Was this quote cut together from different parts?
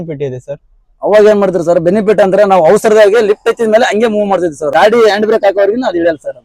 yes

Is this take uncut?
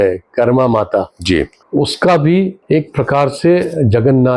no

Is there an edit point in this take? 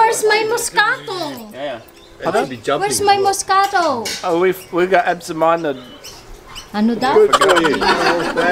no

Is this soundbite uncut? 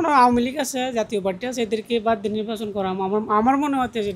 yes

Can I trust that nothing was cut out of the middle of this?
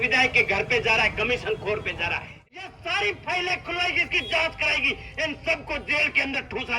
no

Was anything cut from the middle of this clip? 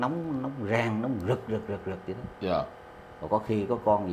no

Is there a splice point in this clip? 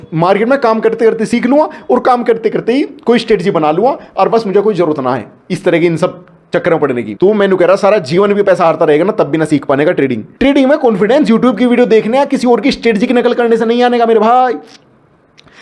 yes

